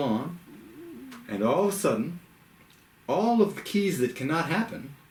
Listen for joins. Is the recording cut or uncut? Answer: uncut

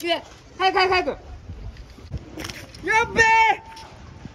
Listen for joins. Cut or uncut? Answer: cut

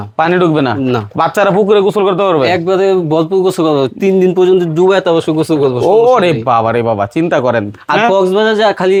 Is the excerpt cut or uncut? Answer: uncut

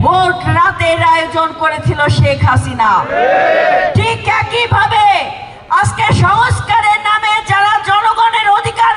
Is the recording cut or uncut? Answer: uncut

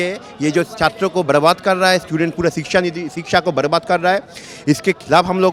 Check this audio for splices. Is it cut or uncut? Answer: uncut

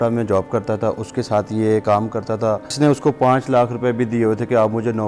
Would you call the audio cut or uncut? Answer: cut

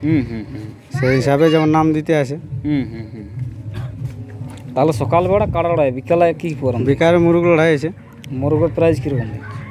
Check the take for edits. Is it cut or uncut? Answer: uncut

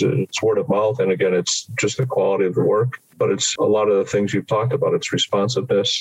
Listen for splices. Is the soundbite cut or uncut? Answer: uncut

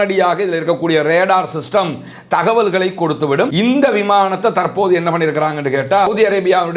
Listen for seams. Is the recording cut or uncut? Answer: cut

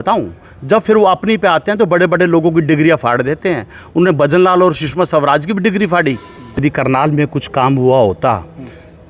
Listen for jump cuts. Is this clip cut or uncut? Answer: cut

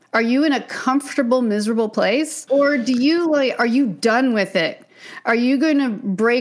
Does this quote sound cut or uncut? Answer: cut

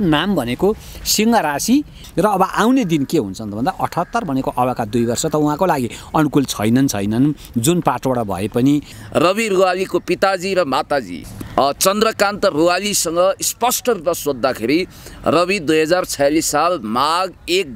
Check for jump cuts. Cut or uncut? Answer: cut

